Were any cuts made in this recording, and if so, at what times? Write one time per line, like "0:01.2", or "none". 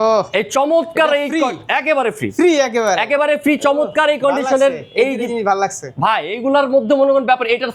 none